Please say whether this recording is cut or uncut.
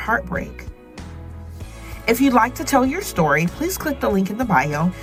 uncut